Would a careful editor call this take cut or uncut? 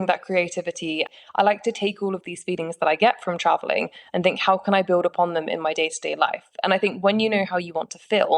cut